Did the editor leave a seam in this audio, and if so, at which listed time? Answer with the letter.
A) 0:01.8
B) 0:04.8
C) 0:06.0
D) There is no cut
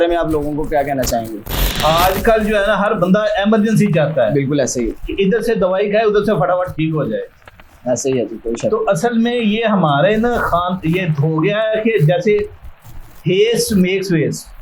A